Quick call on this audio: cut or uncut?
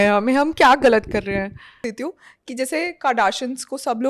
cut